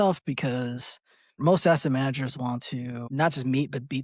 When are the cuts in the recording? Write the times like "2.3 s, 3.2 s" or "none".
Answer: 1.4 s, 3.0 s